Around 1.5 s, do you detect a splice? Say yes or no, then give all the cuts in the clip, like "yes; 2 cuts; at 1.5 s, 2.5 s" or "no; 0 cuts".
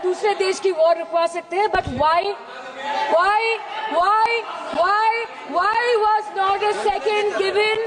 no; 0 cuts